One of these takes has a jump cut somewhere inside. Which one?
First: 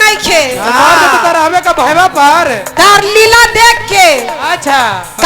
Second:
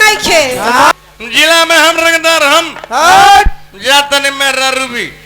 second; 1 cut; at 0.9 s

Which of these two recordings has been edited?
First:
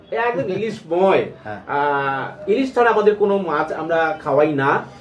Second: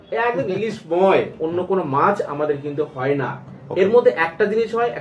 second; 1 cut; at 1.4 s

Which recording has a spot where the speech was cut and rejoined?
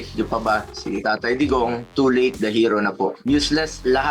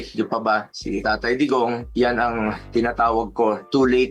first; 1 cut; at 1.9 s

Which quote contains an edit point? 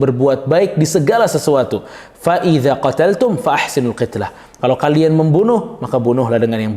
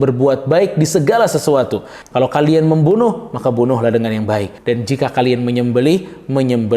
second; 2 cuts; at 2.0 s, 4.5 s

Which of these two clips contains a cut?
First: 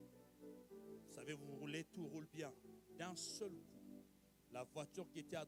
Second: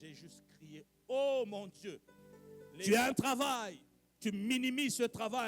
second; 1 cut; at 2.7 s

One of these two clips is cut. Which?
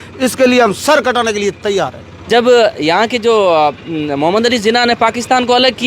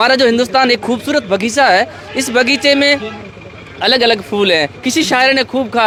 first; 1 cut; at 2.1 s

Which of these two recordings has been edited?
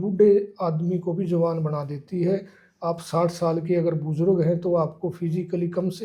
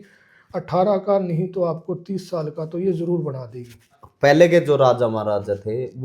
second; 1 cut; at 4.0 s

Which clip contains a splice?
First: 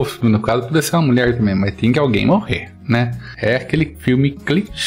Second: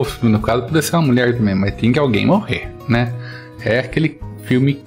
first; 2 cuts; at 3.2 s, 3.9 s

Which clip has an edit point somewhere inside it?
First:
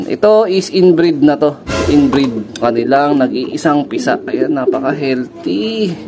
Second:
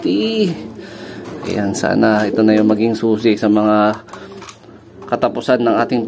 first; 1 cut; at 2.6 s

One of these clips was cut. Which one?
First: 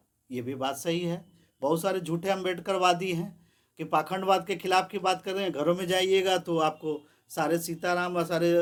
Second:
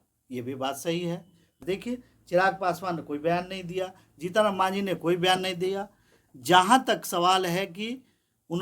second; 1 cut; at 1.6 s

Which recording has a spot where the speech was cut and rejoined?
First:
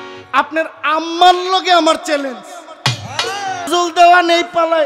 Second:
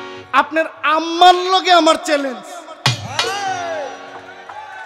first; 1 cut; at 3.7 s

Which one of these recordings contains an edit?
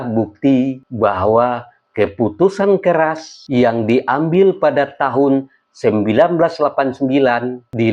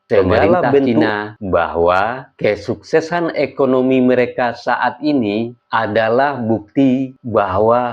second; 1 cut; at 1.2 s

